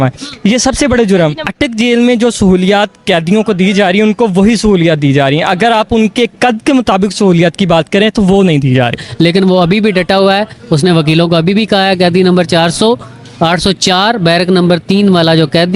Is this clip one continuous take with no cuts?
no; 2 cuts; at 1.4 s, 9.0 s

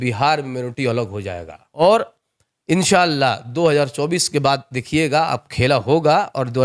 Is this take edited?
yes; 1 cut; at 1.8 s

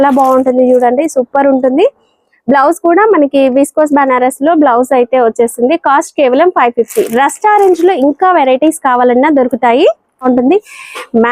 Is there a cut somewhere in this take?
yes; 1 cut; at 10.2 s

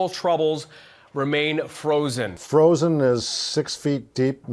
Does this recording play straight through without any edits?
no; 1 cut; at 2.4 s

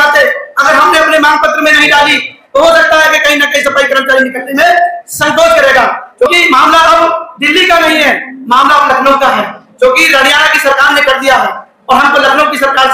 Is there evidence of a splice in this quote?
yes; 1 cut; at 6.3 s

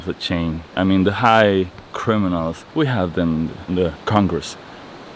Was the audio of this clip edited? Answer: yes; 1 cut; at 2.6 s

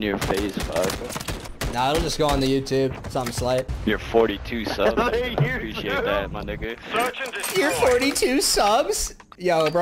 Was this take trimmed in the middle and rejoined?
yes; 2 cuts; at 1.4 s, 3.5 s

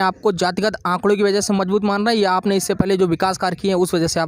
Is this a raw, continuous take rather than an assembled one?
yes; 0 cuts

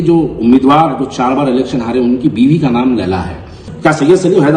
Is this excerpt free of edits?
no; 1 cut; at 3.6 s

